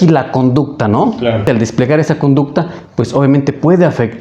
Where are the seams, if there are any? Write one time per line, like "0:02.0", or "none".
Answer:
0:01.4

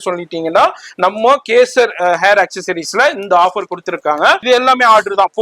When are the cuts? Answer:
0:04.4

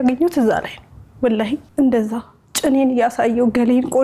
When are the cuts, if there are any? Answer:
0:01.7

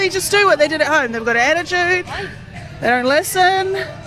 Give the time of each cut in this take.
none

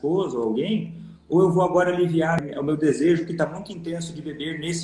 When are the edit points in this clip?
0:02.4

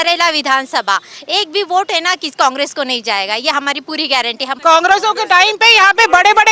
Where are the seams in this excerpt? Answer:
0:04.5

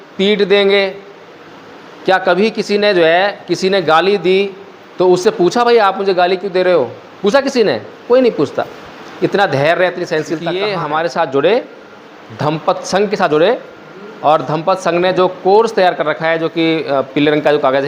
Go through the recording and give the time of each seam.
0:10.7

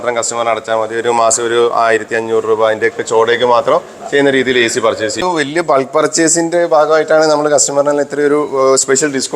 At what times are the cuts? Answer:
0:05.2

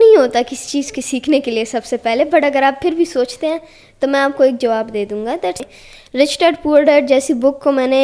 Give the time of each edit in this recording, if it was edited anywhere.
0:05.6

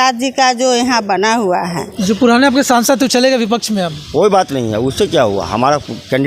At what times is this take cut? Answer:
0:01.9

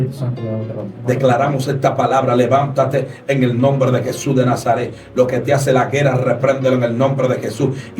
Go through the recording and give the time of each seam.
0:01.2

